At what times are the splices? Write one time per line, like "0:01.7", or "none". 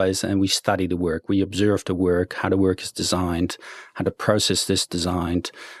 none

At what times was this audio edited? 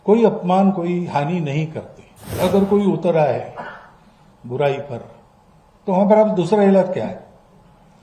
0:02.4

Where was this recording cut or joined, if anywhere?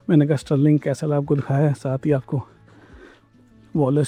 none

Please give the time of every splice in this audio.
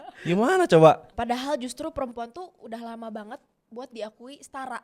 0:01.1
0:03.6

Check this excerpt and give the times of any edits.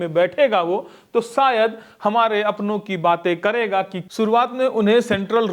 0:04.0

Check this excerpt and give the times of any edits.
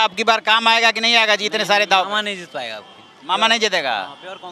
none

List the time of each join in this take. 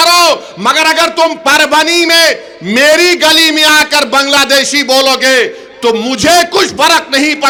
none

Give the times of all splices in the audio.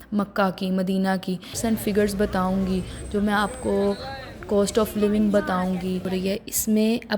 0:01.5
0:06.1

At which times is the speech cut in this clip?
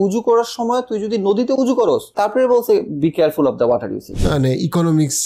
0:02.1
0:04.2

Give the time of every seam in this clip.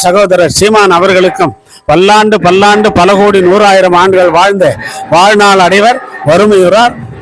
none

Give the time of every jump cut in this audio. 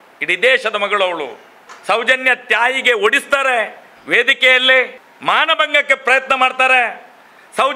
0:01.7
0:05.0

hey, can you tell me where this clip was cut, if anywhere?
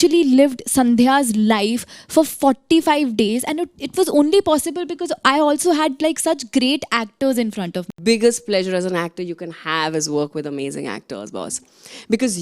0:07.9

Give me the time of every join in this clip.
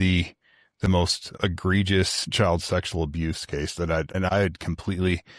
0:01.2
0:02.2
0:04.2

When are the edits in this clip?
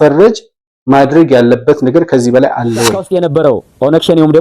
0:03.0

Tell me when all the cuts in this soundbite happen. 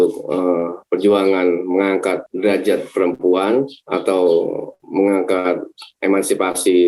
0:02.3
0:03.8
0:04.7

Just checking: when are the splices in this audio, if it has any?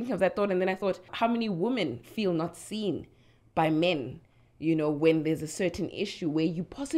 0:01.1

